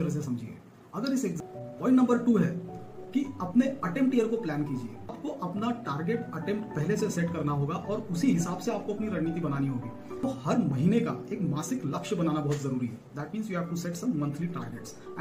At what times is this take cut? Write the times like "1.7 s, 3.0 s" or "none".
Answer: 1.4 s, 5.1 s, 10.2 s